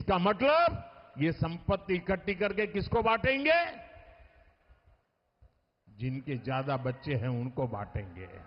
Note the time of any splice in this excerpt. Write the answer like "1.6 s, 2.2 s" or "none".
none